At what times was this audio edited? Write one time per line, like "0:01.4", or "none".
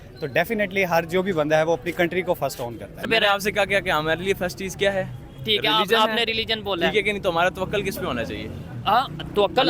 0:03.0